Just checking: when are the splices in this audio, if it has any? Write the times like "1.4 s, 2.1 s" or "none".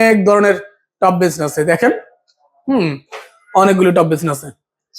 none